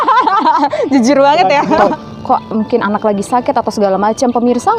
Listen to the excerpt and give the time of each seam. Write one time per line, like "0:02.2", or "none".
0:01.8

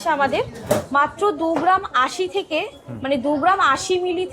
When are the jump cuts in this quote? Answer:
none

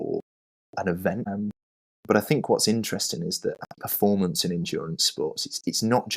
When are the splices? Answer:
0:01.3
0:03.7

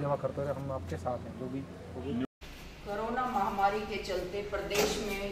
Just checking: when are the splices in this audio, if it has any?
0:02.2

